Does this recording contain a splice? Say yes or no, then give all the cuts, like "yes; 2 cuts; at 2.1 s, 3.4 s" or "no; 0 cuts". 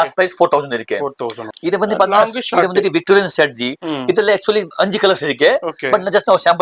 yes; 1 cut; at 1.4 s